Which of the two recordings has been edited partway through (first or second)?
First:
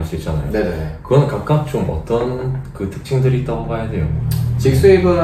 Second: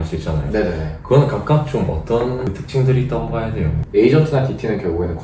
second